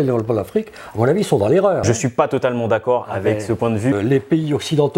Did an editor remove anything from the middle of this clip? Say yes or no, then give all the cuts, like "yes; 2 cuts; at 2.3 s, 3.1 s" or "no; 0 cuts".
yes; 2 cuts; at 1.8 s, 3.9 s